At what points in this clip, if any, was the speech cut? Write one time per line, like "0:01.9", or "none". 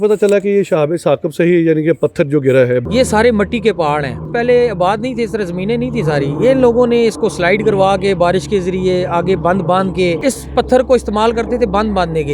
0:02.8
0:04.3
0:10.2